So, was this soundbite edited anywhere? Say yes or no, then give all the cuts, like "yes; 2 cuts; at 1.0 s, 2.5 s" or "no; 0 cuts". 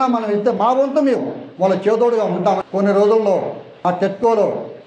yes; 1 cut; at 2.6 s